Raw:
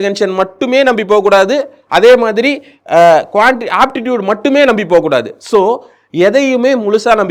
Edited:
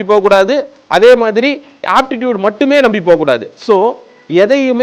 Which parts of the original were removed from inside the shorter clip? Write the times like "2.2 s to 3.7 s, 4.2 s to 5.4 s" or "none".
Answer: 2.8 s to 3.6 s